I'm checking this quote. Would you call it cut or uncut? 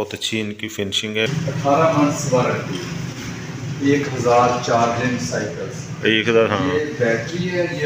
cut